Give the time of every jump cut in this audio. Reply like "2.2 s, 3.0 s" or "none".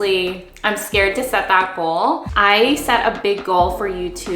2.3 s

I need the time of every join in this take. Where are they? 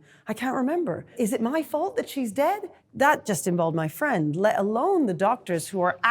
1.1 s, 2.8 s

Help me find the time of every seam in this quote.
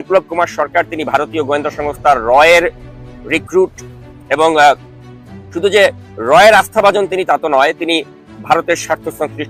none

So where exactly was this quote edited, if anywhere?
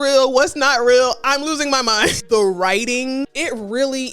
2.2 s

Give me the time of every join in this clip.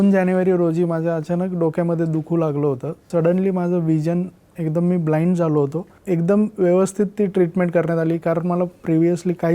2.9 s, 5.9 s

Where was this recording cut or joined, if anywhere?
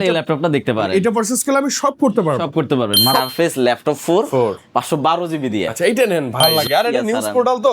3.2 s, 6.4 s

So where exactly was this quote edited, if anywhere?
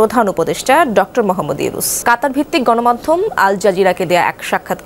1.9 s

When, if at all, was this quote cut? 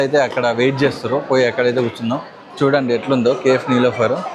none

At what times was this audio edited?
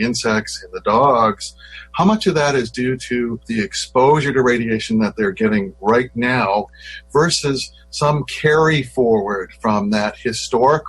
3.4 s, 6.8 s

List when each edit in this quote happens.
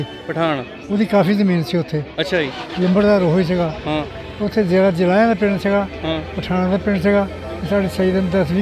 none

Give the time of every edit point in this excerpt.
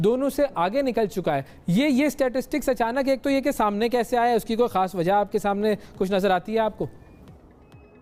none

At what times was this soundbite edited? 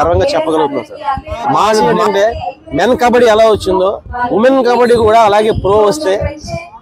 1.9 s

